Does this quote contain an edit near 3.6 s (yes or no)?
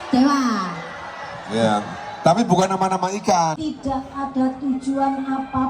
yes